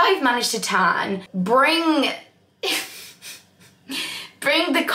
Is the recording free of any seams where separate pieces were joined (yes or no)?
no